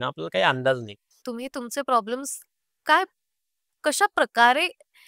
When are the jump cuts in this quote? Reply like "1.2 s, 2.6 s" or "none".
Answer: 1.2 s